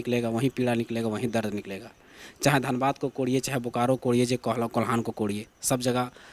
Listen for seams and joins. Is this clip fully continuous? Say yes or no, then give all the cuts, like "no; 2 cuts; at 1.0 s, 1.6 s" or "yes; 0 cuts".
yes; 0 cuts